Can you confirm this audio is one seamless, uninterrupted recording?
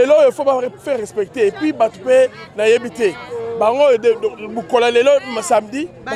yes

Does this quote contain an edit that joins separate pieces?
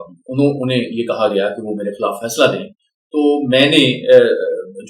no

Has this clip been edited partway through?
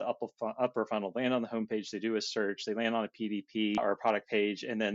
yes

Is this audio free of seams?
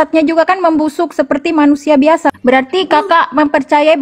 no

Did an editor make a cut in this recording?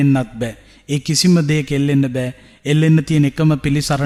no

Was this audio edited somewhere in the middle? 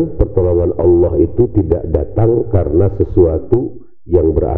no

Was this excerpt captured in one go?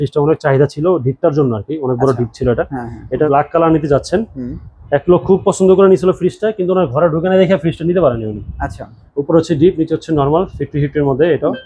no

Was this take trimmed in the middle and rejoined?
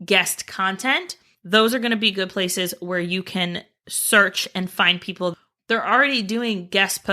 yes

